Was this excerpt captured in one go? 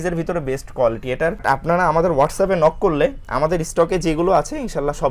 no; 1 cut; at 1.4 s

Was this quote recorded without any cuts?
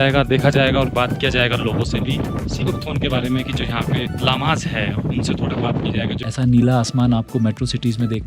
no; 2 cuts; at 4.1 s, 6.3 s

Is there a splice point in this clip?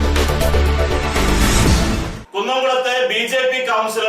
yes; 1 cut; at 2.1 s

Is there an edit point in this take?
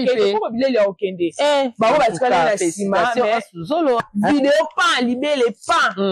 yes; 1 cut; at 4.0 s

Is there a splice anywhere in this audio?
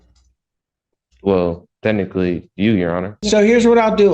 yes; 1 cut; at 3.2 s

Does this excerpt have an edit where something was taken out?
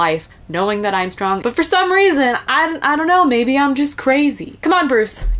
yes; 2 cuts; at 1.4 s, 4.5 s

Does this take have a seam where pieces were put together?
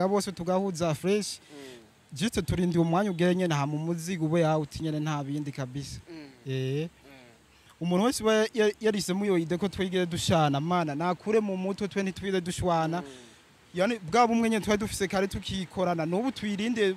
no; 0 cuts

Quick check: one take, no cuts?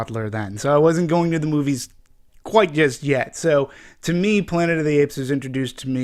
no; 1 cut; at 4.1 s

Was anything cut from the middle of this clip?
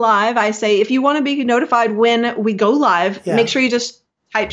no; 0 cuts

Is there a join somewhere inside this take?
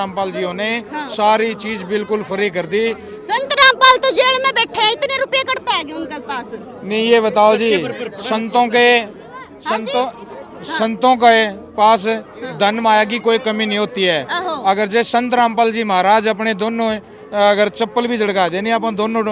no; 0 cuts

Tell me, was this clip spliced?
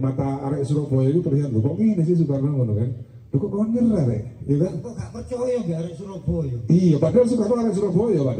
no; 0 cuts

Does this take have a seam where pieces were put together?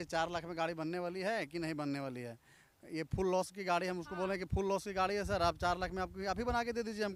no; 0 cuts

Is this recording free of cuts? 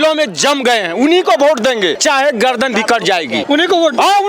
no; 2 cuts; at 2.0 s, 3.4 s

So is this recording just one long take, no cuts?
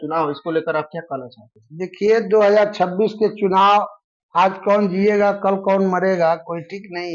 yes; 0 cuts

